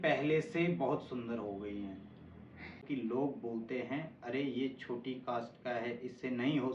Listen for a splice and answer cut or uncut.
cut